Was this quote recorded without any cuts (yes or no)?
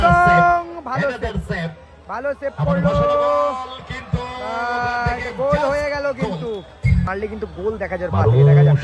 no